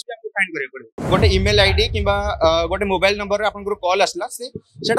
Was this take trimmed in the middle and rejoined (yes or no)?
yes